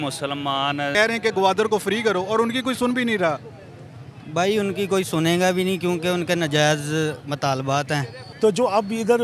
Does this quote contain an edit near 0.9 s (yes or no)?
yes